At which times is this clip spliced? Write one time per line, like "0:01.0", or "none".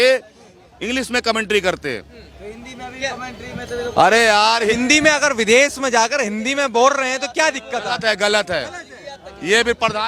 none